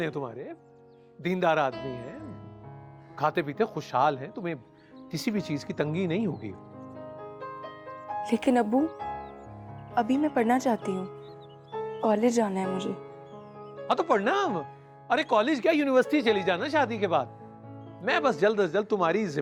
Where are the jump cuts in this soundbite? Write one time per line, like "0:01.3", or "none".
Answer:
none